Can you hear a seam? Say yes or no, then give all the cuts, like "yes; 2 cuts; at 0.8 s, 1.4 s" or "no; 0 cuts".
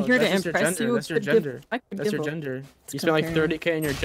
yes; 1 cut; at 2.9 s